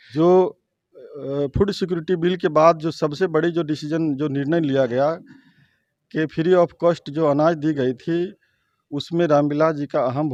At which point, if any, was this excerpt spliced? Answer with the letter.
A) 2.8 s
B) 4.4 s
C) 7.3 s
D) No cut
D